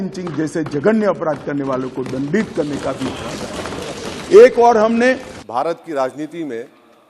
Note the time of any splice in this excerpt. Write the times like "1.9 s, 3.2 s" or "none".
5.3 s